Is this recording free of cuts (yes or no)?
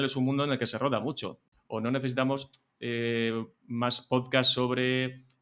no